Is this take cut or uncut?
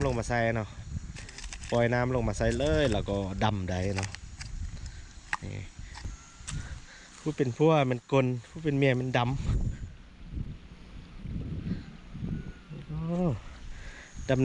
cut